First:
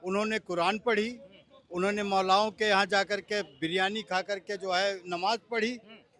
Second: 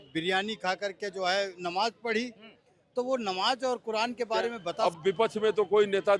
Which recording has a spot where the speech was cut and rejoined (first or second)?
second